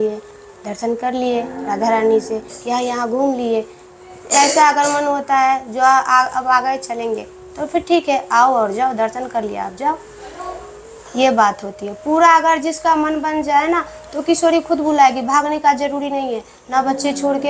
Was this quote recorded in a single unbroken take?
yes; 0 cuts

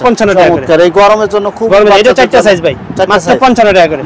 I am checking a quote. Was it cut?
no; 0 cuts

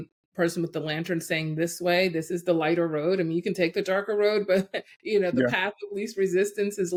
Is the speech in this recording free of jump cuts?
yes; 0 cuts

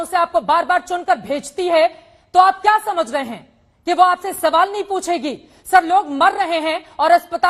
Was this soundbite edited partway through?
no; 0 cuts

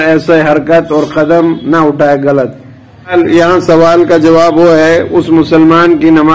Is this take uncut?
no; 1 cut; at 3.1 s

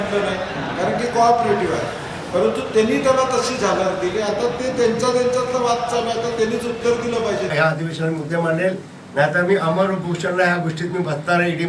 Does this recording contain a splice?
yes; 1 cut; at 7.5 s

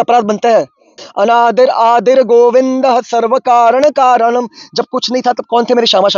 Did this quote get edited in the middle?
yes; 1 cut; at 1.0 s

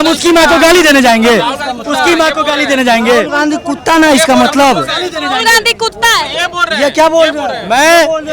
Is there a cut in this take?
no; 0 cuts

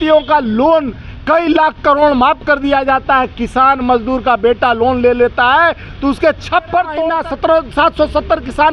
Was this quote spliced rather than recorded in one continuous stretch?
yes; 1 cut; at 7.0 s

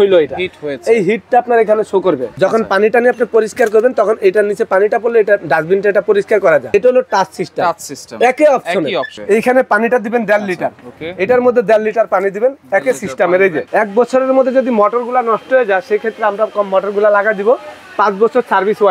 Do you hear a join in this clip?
yes; 4 cuts; at 2.3 s, 6.7 s, 9.1 s, 13.6 s

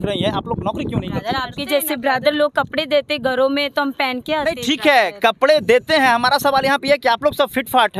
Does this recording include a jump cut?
no; 0 cuts

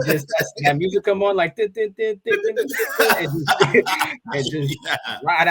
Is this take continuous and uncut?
no; 1 cut; at 4.2 s

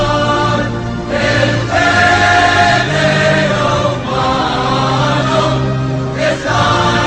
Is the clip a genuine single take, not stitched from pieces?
yes; 0 cuts

